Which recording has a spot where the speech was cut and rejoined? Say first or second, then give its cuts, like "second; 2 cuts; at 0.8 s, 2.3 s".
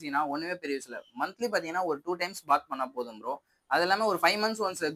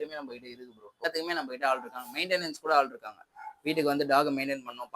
second; 1 cut; at 1.0 s